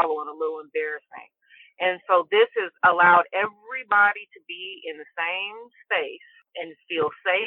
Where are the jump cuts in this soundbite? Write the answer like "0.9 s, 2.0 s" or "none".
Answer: none